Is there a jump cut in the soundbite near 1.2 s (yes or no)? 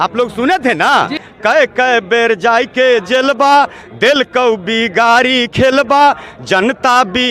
yes